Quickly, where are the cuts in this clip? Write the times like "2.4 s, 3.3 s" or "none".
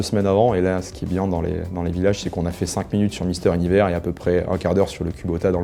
none